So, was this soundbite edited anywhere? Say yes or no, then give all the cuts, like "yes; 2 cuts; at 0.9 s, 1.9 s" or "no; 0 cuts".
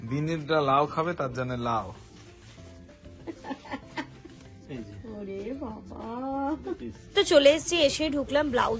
yes; 1 cut; at 7.1 s